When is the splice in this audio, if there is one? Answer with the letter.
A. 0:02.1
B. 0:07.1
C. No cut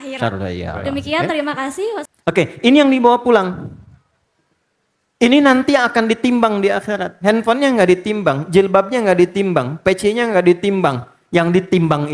A